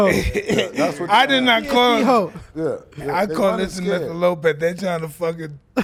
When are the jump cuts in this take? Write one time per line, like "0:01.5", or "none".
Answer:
none